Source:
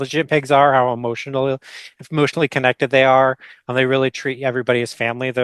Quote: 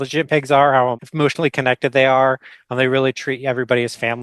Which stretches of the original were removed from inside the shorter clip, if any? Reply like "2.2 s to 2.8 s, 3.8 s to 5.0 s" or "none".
1.0 s to 2.0 s